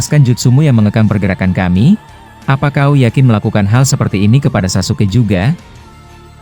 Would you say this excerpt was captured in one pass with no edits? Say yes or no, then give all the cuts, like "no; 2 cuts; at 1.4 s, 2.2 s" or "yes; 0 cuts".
yes; 0 cuts